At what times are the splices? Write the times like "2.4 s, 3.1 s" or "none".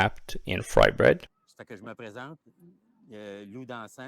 1.4 s